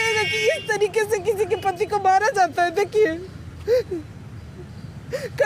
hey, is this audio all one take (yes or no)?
yes